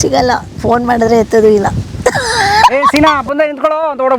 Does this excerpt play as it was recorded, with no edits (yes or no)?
yes